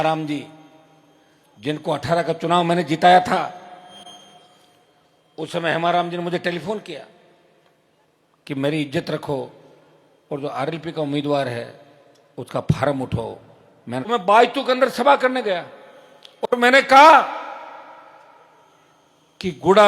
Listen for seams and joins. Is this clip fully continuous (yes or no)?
no